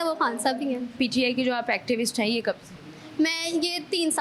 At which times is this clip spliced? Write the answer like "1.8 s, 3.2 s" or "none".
0.9 s